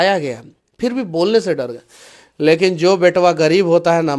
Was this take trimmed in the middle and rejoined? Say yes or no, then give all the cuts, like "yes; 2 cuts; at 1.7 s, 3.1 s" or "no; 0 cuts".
no; 0 cuts